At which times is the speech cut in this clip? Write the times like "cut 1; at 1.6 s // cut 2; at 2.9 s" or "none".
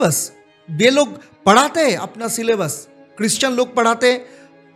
none